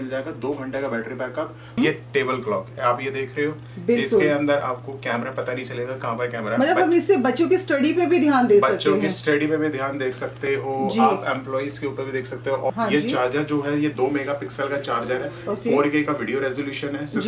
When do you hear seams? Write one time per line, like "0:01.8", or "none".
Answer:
0:01.8
0:12.7